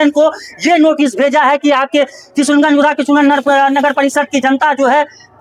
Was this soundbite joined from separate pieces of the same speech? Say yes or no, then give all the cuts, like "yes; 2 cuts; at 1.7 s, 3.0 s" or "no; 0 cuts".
no; 0 cuts